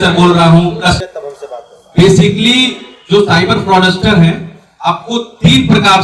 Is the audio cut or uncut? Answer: cut